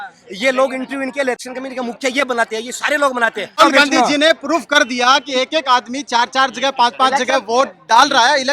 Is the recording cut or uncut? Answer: cut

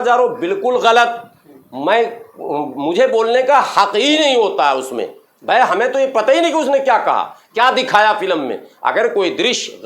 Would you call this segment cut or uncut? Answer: uncut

